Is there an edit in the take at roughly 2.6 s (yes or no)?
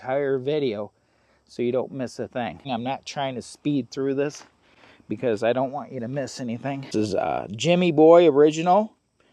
yes